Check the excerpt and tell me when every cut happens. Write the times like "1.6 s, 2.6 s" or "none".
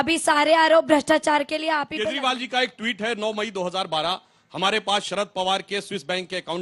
1.9 s